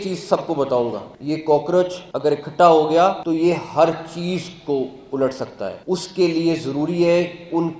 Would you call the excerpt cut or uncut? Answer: cut